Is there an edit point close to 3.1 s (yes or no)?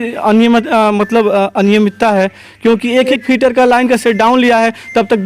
yes